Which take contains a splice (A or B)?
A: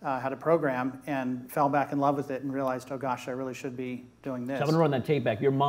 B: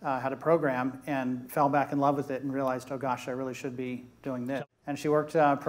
B